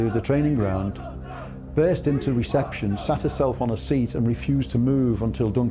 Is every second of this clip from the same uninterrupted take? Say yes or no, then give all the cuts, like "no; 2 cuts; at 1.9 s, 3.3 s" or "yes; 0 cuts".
yes; 0 cuts